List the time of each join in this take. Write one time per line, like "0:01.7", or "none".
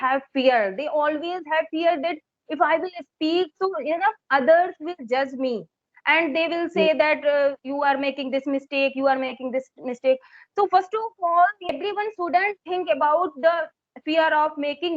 0:11.8